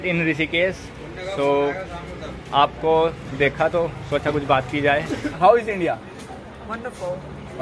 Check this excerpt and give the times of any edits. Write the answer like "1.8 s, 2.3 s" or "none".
5.3 s